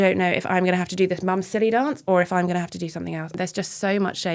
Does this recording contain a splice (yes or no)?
yes